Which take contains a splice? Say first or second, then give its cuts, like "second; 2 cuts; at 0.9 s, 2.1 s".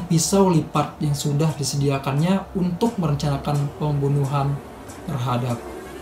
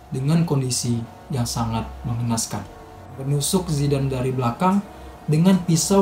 second; 1 cut; at 3.2 s